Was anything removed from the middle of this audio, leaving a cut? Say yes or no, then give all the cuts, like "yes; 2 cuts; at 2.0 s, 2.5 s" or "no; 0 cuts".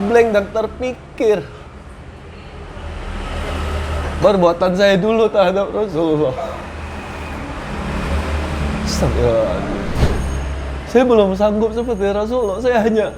yes; 1 cut; at 10.0 s